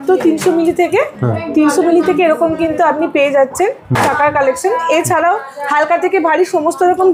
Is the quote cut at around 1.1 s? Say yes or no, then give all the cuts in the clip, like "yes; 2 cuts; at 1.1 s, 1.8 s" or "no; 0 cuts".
no; 0 cuts